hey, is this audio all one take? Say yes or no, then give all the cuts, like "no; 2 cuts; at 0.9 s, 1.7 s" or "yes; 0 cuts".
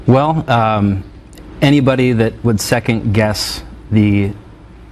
yes; 0 cuts